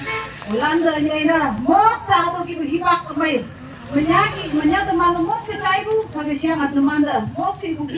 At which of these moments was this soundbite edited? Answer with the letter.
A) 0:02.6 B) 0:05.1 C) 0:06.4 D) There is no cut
D